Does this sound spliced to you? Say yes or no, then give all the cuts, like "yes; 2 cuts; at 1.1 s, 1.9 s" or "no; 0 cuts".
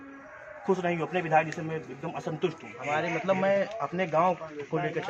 yes; 1 cut; at 2.7 s